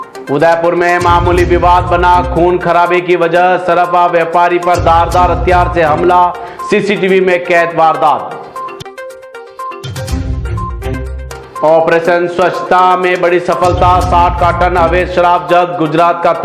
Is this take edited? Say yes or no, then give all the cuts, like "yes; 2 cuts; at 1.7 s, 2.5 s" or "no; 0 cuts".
no; 0 cuts